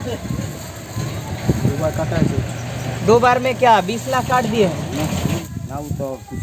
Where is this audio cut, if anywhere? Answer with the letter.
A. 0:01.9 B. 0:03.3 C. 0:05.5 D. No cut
C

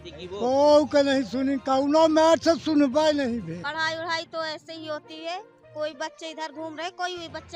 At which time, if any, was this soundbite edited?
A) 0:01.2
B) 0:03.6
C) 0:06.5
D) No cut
B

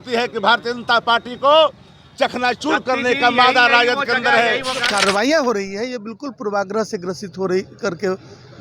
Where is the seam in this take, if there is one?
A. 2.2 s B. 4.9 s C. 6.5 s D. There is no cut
B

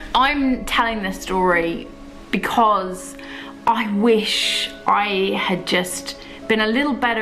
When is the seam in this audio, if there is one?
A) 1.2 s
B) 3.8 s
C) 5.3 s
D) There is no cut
D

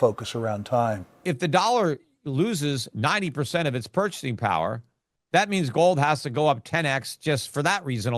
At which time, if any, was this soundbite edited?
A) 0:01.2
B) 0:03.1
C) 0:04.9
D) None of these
A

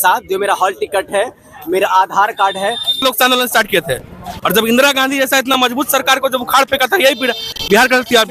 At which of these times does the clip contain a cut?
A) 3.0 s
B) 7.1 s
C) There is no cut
A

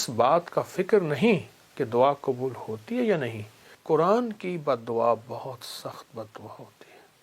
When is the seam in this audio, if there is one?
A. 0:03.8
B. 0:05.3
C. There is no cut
A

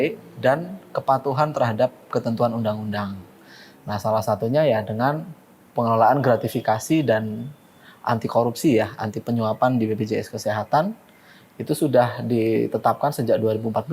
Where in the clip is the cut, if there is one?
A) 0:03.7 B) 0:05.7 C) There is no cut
C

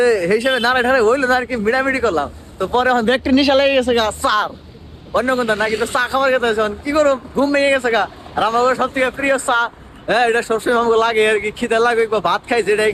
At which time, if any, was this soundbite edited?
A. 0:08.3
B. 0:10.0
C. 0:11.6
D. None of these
D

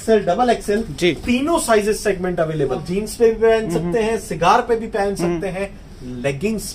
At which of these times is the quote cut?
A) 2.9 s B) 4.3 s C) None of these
A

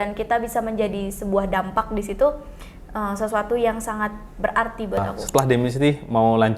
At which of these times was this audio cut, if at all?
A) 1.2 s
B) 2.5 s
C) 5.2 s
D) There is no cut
C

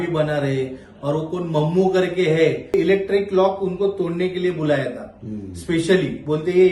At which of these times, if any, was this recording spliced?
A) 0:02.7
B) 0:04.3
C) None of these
A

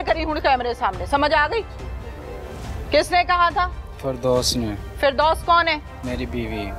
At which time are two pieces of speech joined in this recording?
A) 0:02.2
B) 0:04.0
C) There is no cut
C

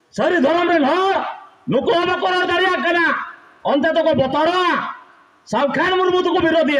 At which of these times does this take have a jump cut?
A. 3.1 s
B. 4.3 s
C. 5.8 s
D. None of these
D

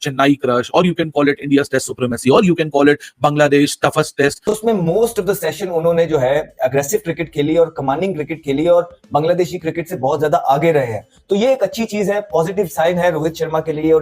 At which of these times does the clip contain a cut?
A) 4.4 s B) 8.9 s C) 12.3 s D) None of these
A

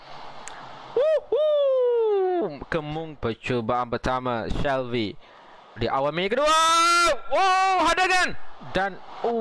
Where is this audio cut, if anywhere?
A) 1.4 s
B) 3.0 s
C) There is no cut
B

